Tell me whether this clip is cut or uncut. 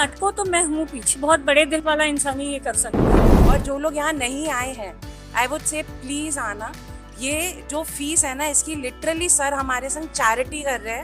cut